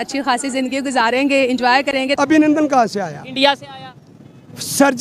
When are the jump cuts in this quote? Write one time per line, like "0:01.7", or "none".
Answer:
0:02.1